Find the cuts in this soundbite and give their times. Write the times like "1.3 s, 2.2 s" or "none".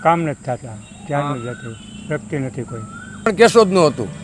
3.3 s